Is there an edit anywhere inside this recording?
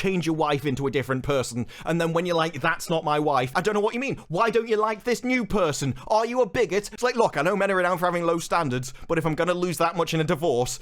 yes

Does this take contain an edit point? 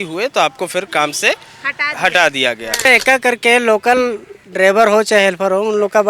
yes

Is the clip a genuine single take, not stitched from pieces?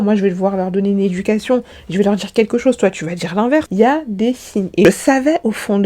no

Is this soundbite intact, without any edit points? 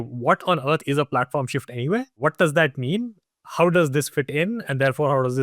no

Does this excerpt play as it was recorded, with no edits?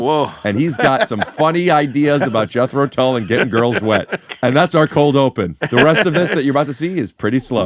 no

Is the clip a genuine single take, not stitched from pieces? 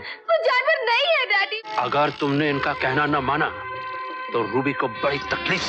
no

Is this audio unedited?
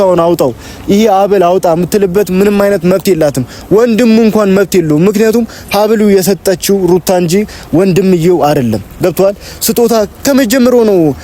yes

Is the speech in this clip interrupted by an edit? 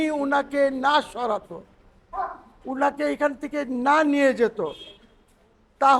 no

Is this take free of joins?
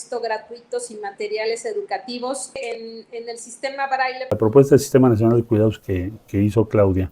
no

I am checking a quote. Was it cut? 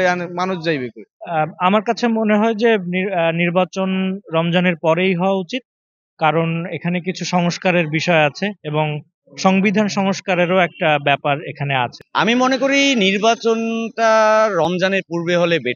yes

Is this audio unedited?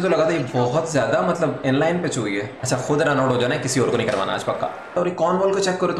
no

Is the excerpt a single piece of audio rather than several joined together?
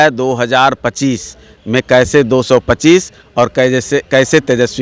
yes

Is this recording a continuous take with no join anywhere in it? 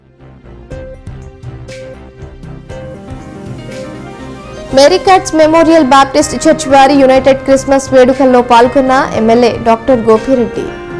no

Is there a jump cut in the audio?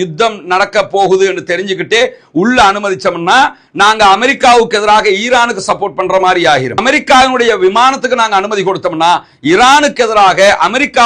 no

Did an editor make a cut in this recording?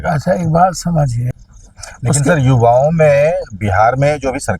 yes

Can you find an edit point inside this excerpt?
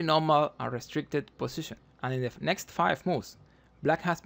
yes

